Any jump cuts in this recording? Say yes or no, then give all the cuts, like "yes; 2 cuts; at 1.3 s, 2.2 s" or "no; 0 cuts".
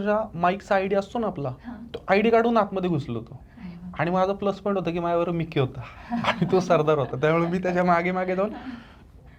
no; 0 cuts